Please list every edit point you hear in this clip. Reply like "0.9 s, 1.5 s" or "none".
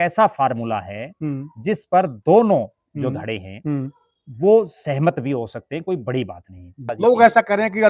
6.8 s